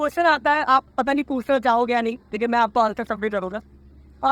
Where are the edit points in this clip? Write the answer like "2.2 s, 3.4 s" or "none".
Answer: none